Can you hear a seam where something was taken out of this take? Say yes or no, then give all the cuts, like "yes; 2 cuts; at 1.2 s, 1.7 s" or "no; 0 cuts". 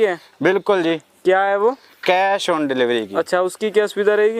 no; 0 cuts